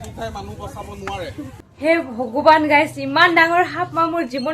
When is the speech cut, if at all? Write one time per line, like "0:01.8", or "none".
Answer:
0:01.4